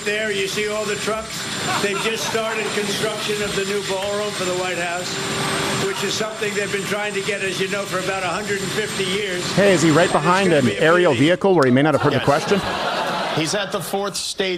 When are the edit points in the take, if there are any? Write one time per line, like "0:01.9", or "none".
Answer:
none